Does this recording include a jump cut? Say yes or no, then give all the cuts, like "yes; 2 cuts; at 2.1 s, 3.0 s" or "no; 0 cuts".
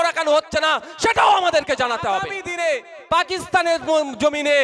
yes; 1 cut; at 2.4 s